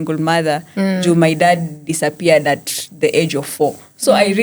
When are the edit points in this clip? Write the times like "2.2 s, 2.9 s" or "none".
none